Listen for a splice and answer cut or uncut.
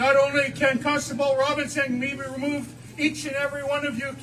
uncut